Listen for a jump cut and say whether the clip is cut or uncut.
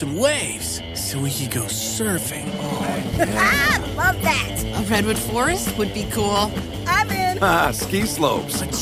uncut